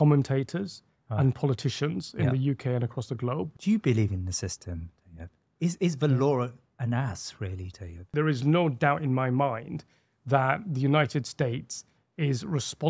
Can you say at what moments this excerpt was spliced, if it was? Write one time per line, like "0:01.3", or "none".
0:03.5
0:08.1